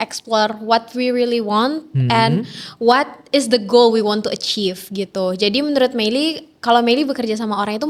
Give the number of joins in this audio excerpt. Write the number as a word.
zero